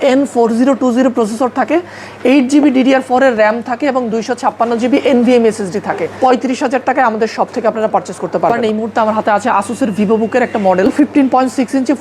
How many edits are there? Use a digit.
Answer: 3